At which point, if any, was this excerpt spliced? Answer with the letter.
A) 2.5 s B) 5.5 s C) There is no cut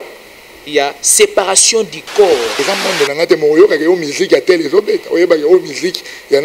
A